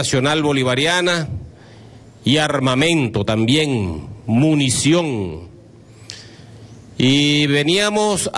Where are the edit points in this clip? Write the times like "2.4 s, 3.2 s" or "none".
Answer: none